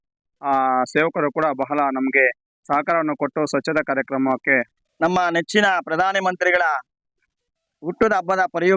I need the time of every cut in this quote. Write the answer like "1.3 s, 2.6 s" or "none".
4.7 s

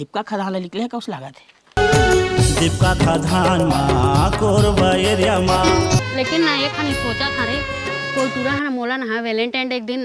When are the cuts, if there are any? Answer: 6.1 s

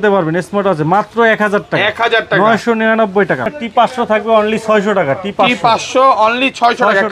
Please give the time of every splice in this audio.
3.5 s

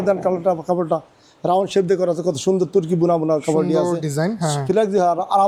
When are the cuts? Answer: none

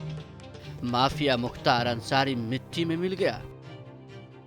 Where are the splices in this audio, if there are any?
none

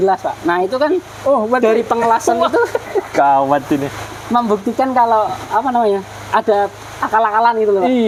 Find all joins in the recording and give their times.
none

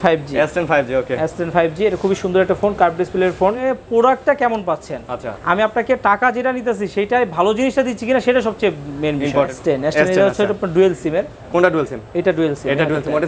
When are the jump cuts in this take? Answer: 3.6 s, 9.6 s

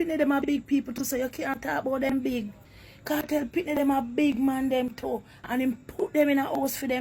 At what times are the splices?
none

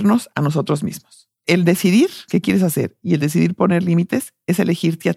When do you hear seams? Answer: 1.4 s, 2.2 s

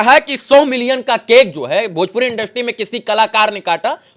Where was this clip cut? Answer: none

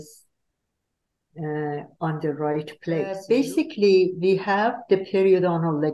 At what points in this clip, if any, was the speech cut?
3.2 s

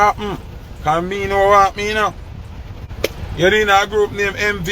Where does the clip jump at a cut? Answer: 2.8 s

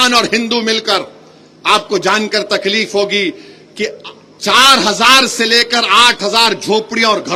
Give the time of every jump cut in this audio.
none

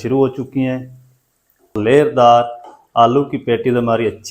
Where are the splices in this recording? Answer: 1.8 s

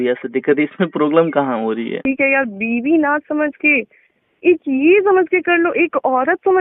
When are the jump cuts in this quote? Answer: 2.0 s

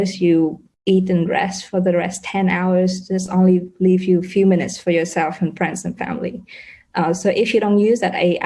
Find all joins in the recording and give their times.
none

